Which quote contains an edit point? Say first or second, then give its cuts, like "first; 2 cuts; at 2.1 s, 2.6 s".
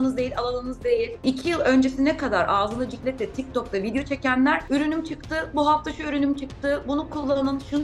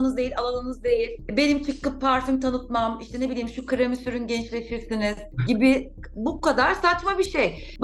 first; 1 cut; at 1.2 s